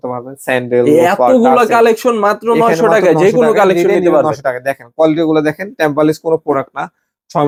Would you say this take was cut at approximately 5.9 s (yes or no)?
no